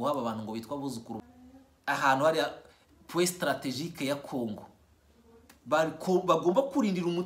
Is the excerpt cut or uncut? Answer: cut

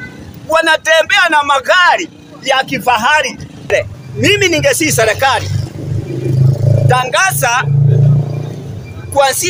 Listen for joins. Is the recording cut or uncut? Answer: cut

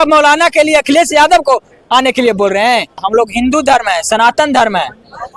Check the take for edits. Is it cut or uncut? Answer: cut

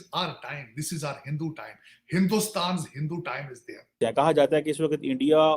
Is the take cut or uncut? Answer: cut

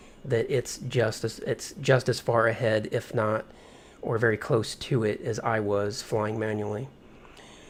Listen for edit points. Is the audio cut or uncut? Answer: uncut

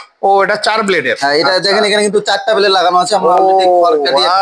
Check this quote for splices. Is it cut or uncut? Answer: uncut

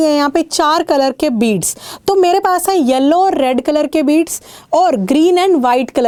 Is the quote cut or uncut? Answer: uncut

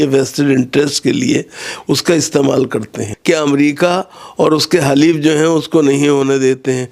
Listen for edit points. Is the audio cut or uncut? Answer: cut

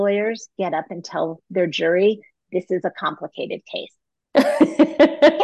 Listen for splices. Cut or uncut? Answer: uncut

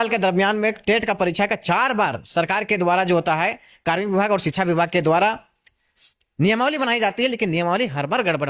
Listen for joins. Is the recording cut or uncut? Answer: uncut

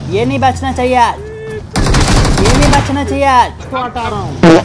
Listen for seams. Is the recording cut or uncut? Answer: cut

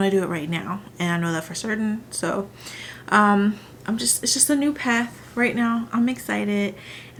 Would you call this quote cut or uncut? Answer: uncut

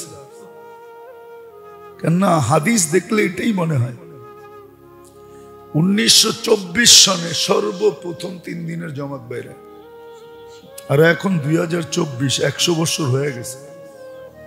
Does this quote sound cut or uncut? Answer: cut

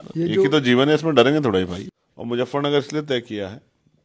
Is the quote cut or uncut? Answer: cut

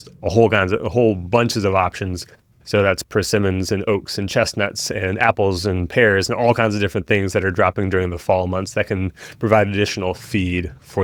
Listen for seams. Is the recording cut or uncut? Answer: uncut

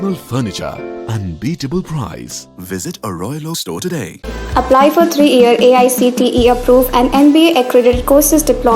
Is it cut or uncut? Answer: uncut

